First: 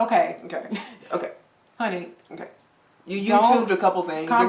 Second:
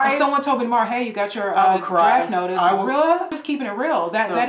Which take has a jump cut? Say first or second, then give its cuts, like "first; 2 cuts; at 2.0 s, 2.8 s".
second; 1 cut; at 3.4 s